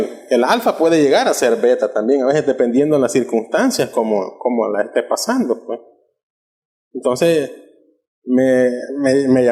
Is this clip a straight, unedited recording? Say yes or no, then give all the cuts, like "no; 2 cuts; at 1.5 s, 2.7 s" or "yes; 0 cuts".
yes; 0 cuts